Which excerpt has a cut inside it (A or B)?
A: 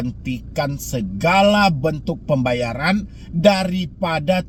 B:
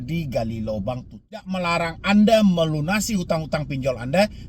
B